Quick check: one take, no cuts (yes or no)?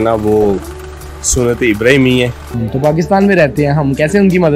no